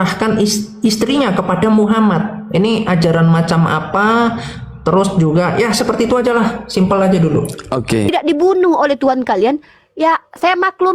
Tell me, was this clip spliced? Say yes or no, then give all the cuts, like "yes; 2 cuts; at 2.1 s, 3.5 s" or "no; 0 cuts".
yes; 1 cut; at 8.1 s